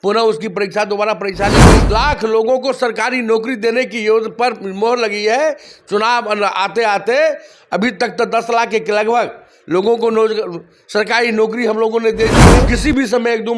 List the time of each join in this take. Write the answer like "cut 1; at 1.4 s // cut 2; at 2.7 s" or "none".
cut 1; at 1.8 s // cut 2; at 12.7 s